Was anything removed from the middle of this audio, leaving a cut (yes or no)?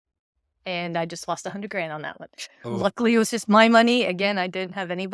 no